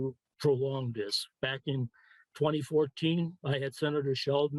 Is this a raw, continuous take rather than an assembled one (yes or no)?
yes